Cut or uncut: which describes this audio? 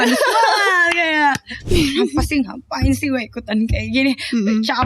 cut